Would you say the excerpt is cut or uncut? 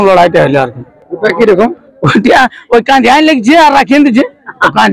uncut